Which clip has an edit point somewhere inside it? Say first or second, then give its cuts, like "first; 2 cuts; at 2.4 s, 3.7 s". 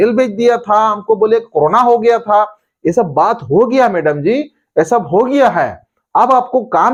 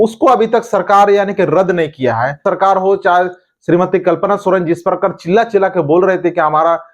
second; 1 cut; at 2.4 s